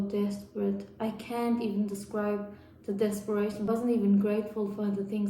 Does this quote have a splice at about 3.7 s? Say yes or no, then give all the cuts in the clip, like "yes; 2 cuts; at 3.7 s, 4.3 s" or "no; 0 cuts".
yes; 1 cut; at 3.7 s